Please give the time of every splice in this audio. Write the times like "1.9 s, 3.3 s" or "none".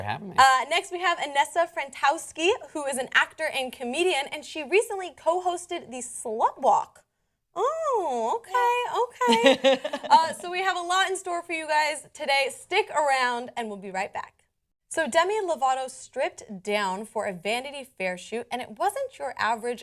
13.2 s